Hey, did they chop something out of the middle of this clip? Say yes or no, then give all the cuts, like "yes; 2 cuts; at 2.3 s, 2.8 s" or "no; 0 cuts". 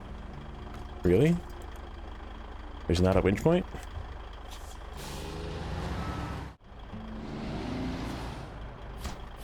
yes; 1 cut; at 6.5 s